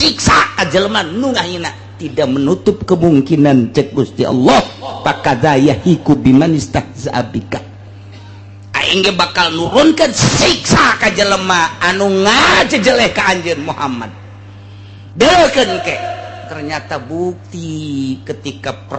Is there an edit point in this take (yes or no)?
no